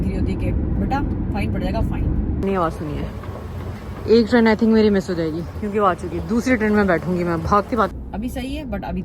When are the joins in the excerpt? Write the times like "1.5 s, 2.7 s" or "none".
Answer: 2.4 s, 7.9 s